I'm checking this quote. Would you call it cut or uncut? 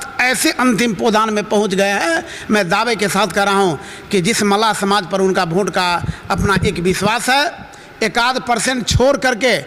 uncut